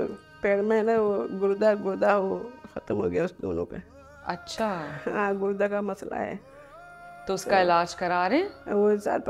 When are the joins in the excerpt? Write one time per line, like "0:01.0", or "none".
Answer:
none